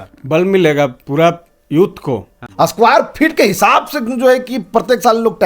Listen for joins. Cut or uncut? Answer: cut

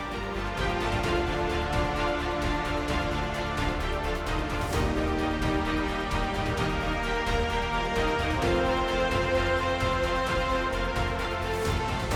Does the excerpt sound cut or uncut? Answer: uncut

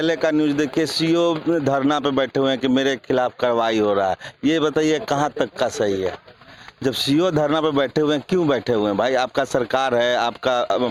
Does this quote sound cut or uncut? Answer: uncut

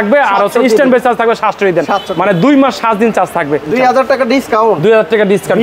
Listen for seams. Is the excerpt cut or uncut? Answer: cut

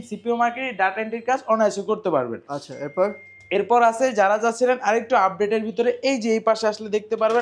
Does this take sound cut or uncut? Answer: uncut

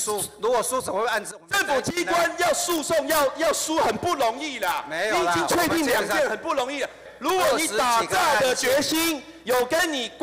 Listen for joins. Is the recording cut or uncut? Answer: cut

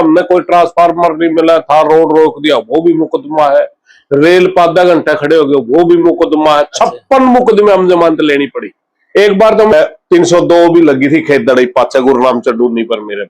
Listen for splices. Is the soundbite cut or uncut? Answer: cut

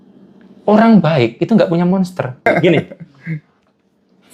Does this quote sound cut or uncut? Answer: cut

